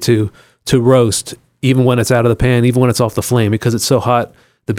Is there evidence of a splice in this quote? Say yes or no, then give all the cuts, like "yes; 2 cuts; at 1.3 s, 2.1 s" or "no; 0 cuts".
no; 0 cuts